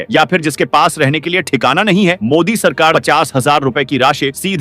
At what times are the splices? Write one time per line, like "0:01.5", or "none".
0:02.9